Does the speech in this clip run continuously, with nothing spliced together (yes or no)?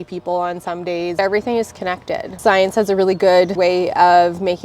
no